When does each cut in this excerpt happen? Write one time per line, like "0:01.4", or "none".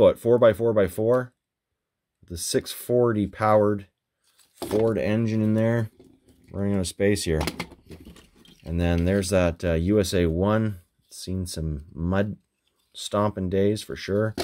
none